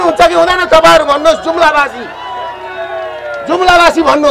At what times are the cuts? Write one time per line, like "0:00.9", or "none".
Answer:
none

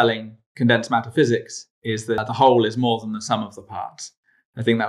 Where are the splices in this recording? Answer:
0:02.2

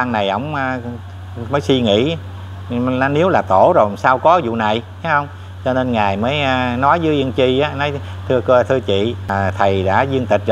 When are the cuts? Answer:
0:09.3

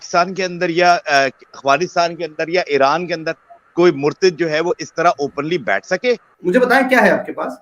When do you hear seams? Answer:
0:06.3

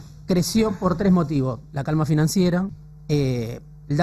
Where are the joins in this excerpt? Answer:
0:02.8

